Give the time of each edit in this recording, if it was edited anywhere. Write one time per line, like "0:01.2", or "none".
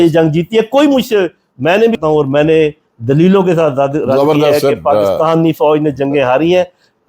0:02.0